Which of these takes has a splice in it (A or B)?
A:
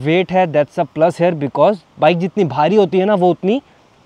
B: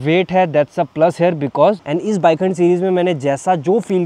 B